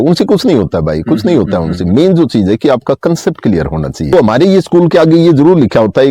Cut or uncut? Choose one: cut